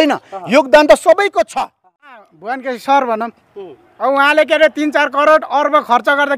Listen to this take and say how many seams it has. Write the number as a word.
one